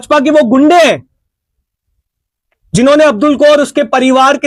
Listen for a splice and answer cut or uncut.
uncut